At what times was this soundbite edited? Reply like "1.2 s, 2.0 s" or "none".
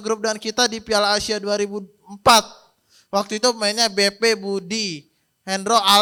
none